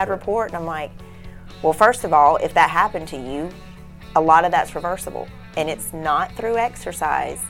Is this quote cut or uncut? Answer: uncut